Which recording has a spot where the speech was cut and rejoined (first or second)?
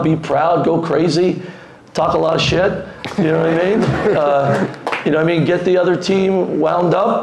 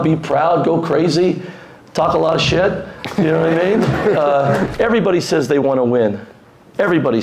second